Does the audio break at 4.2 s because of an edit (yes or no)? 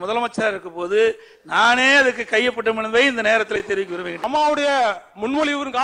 yes